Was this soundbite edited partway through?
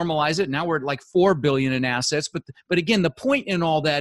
no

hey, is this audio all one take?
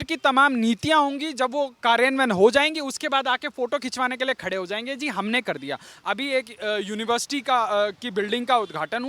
yes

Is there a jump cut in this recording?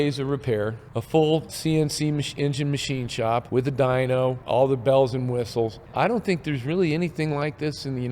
yes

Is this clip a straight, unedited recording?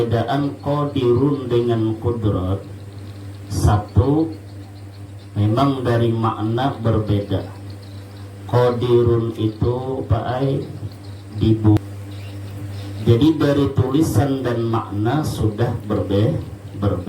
no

